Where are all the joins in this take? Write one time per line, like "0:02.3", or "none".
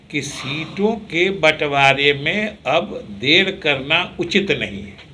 none